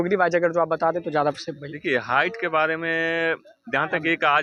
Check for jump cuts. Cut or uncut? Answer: uncut